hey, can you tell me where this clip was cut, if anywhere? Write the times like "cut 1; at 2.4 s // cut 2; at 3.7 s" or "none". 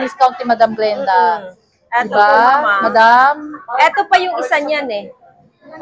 none